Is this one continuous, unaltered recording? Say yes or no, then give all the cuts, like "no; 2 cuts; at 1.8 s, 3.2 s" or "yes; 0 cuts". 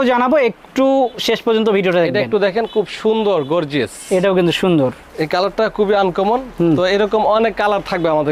yes; 0 cuts